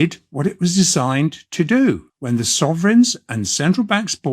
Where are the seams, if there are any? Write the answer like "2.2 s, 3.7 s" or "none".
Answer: 2.1 s